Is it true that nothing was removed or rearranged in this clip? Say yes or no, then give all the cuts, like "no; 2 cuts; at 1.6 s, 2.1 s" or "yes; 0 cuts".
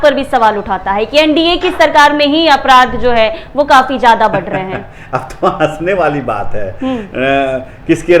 yes; 0 cuts